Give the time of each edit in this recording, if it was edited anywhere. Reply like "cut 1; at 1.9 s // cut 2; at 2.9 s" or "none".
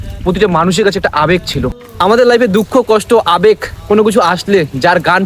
cut 1; at 1.9 s